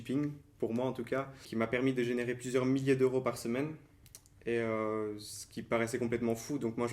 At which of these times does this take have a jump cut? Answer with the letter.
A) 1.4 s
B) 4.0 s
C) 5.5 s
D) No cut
A